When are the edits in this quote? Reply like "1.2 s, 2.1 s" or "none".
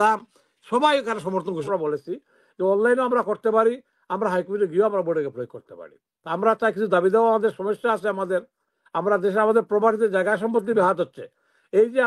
1.7 s